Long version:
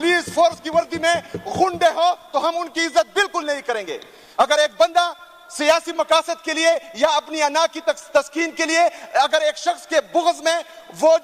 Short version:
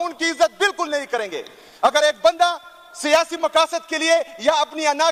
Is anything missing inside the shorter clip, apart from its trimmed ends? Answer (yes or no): no